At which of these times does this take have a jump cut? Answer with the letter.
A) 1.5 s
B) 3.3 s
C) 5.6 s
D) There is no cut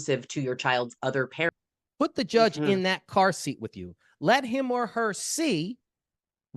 A